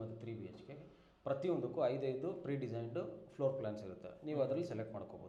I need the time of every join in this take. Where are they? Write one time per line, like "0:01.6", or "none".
none